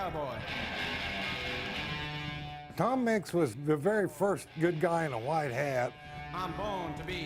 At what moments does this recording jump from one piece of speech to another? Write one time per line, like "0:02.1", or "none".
0:02.6
0:03.6
0:06.1